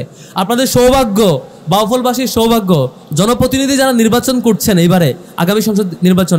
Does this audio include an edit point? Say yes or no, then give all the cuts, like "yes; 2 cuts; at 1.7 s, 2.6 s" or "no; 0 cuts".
yes; 1 cut; at 3.0 s